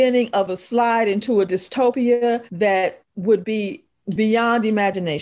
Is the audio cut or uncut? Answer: uncut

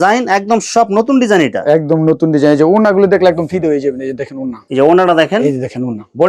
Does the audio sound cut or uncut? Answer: uncut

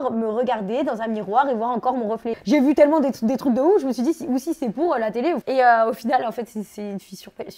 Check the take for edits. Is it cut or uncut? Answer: cut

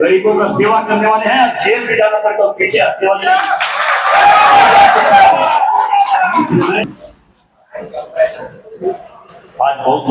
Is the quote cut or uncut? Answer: cut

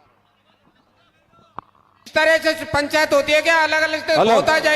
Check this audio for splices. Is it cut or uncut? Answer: cut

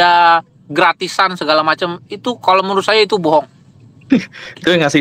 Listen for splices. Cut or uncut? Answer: uncut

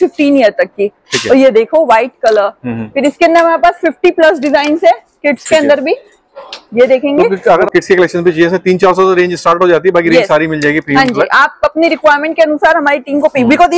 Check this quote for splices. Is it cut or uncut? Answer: uncut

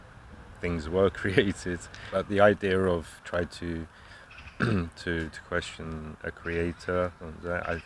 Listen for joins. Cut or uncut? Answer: cut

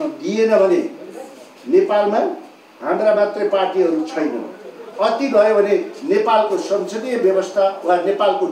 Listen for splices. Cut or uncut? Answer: uncut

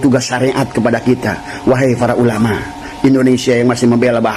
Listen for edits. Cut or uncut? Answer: cut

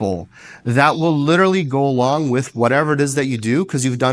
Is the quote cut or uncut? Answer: uncut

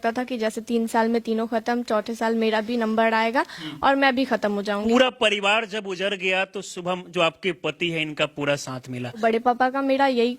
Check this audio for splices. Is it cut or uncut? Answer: cut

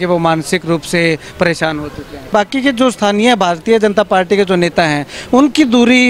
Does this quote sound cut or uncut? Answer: cut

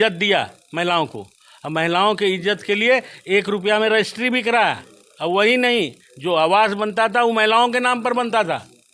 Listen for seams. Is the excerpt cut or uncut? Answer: uncut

